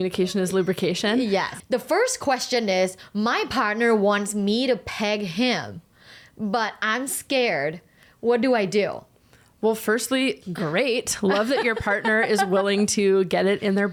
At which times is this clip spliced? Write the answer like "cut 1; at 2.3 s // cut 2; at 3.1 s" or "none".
none

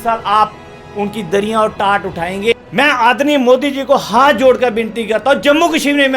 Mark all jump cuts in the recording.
cut 1; at 2.5 s

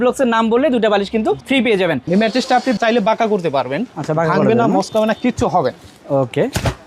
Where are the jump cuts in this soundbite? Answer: cut 1; at 2.0 s

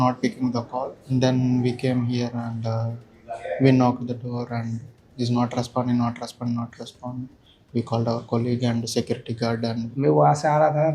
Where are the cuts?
cut 1; at 1.0 s // cut 2; at 9.9 s

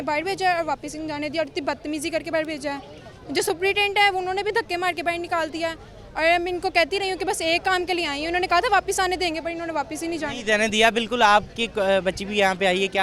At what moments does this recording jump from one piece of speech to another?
none

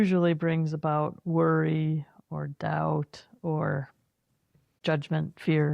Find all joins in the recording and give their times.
cut 1; at 4.7 s

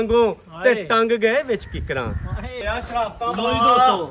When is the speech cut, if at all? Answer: cut 1; at 2.6 s

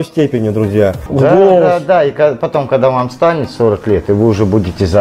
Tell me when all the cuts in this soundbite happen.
cut 1; at 1.0 s

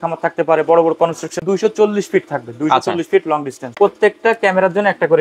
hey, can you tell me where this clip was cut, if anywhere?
cut 1; at 1.4 s // cut 2; at 3.6 s

